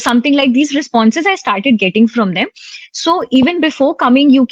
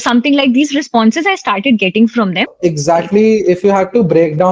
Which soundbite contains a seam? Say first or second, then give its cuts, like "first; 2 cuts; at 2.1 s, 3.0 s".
second; 1 cut; at 2.5 s